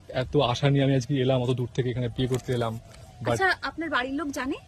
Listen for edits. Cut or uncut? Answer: uncut